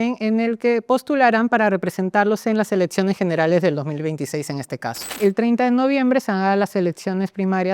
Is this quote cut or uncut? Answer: cut